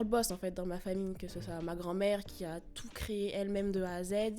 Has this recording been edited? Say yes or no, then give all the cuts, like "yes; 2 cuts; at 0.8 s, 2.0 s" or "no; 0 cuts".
no; 0 cuts